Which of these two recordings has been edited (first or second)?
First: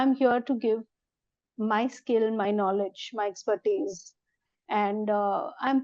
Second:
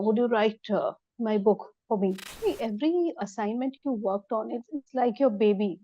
second